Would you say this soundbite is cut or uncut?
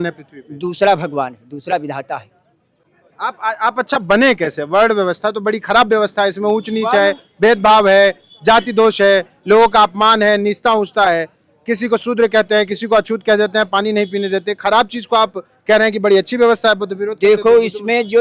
uncut